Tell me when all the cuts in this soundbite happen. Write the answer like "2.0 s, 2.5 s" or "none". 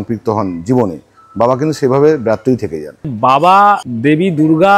3.1 s, 3.9 s

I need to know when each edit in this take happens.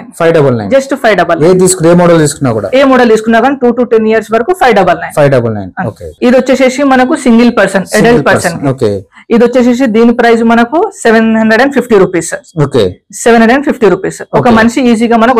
none

